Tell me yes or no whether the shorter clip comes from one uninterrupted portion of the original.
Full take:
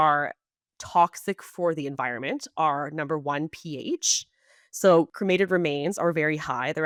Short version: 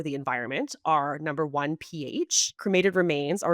no